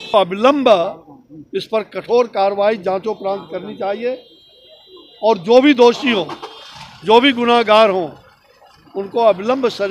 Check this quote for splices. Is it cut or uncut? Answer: uncut